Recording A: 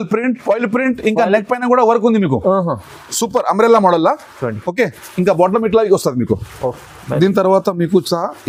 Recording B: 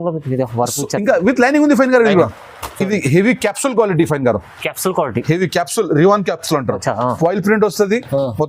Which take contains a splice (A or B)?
B